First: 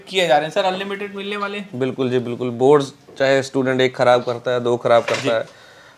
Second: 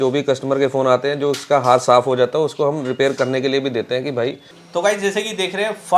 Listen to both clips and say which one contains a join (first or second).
second